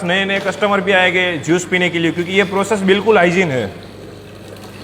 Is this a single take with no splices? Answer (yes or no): yes